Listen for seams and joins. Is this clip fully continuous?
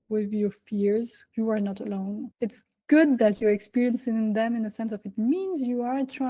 no; 2 cuts; at 1.2 s, 2.3 s

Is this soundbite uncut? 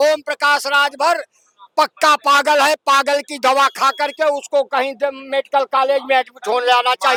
yes; 0 cuts

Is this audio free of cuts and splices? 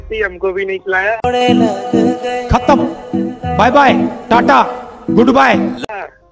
yes; 0 cuts

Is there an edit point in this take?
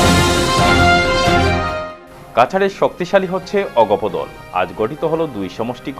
yes; 1 cut; at 1.3 s

